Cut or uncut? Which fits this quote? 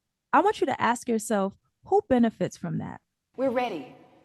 cut